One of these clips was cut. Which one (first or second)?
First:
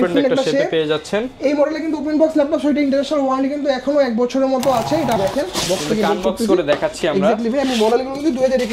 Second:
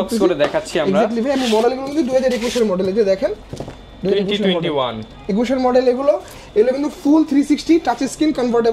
first